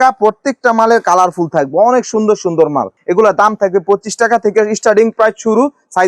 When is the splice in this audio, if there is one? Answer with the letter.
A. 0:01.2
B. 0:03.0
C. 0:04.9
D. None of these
B